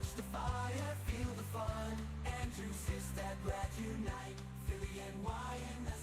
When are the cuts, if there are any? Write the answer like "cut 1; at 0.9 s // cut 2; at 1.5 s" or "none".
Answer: none